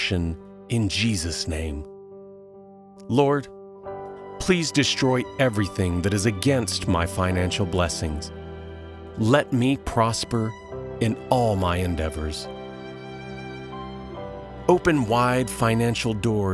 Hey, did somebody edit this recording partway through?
yes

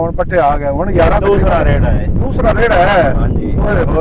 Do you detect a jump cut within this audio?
no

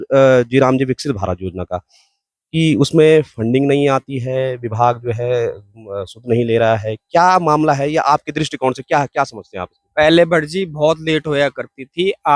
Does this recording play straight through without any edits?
yes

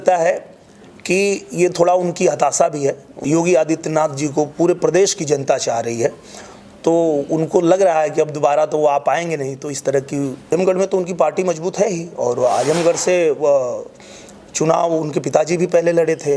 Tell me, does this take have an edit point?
yes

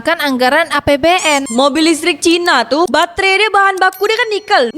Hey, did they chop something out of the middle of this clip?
yes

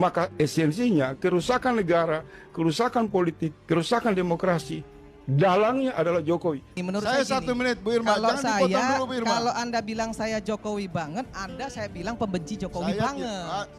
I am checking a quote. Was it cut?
yes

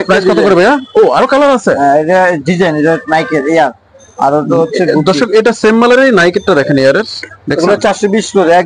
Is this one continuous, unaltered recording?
yes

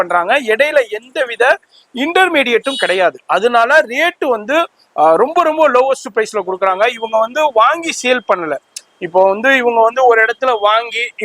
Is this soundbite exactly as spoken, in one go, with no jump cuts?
yes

